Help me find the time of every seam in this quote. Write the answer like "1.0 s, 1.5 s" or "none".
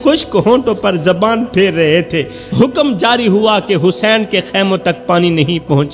2.4 s